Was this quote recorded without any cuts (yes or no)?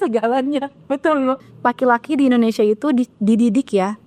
no